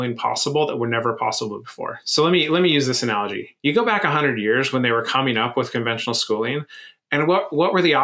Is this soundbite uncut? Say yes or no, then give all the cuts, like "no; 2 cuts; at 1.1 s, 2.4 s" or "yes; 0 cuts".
yes; 0 cuts